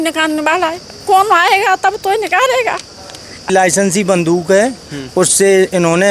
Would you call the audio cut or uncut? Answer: cut